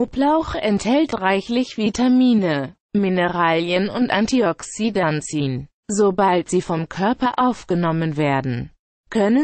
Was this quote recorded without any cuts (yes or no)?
no